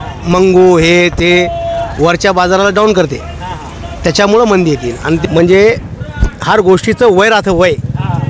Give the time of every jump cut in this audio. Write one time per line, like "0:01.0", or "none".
0:05.2